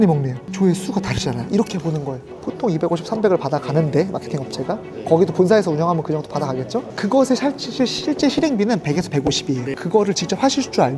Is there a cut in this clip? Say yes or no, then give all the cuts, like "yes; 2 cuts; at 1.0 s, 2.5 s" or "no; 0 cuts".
yes; 2 cuts; at 2.3 s, 6.8 s